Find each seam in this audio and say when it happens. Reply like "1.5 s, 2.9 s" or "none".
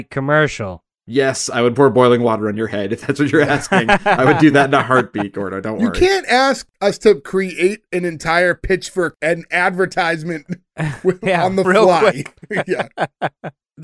9.1 s